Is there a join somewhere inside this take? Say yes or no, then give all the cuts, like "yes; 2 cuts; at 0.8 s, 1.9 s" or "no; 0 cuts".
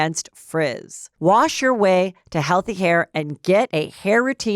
yes; 1 cut; at 1.0 s